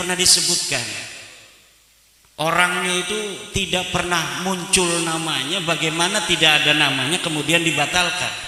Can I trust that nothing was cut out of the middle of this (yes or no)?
yes